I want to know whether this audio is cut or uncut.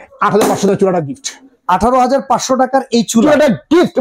uncut